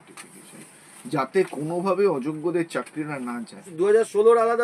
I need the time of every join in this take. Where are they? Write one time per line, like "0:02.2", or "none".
0:03.6